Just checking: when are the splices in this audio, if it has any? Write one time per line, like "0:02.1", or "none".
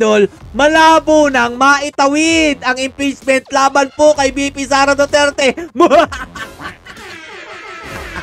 none